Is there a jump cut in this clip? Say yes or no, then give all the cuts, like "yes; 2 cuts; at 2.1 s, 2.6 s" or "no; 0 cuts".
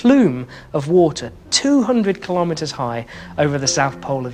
no; 0 cuts